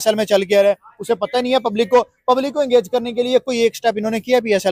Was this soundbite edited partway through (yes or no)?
no